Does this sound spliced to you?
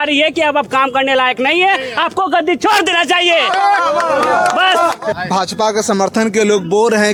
no; 0 cuts

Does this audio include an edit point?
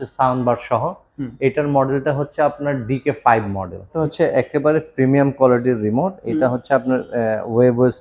yes; 1 cut; at 4.0 s

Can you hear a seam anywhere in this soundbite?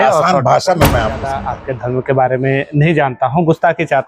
yes; 1 cut; at 1.4 s

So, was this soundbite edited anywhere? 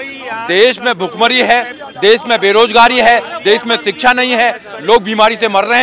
no; 0 cuts

